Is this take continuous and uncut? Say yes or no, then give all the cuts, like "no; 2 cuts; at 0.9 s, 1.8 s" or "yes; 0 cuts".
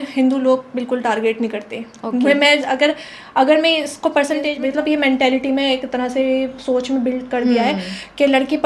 no; 1 cut; at 4.5 s